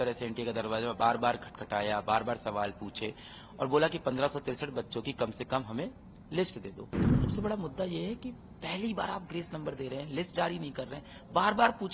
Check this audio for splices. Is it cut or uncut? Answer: cut